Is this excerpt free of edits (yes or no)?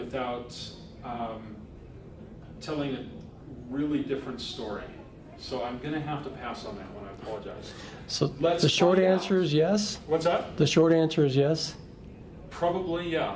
yes